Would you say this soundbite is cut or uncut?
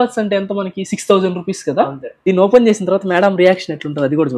cut